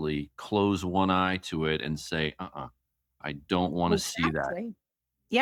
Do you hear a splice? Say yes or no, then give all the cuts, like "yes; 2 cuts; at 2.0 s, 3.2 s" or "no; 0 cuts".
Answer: no; 0 cuts